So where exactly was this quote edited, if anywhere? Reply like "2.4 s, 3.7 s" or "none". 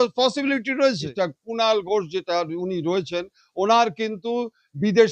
1.1 s